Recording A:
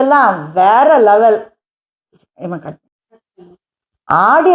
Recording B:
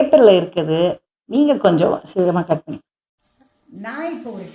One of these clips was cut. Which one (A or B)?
A